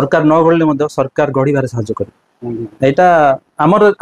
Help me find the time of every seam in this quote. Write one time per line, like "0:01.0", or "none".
none